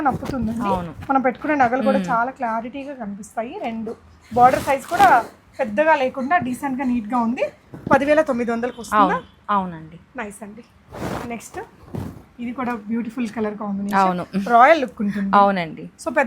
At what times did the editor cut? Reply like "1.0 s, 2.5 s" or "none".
none